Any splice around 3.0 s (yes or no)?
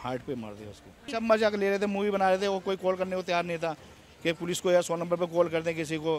no